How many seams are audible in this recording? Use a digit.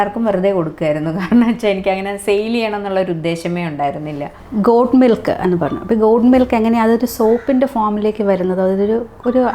0